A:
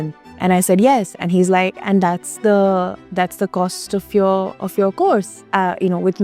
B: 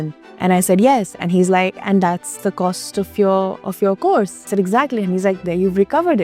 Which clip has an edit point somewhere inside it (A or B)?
B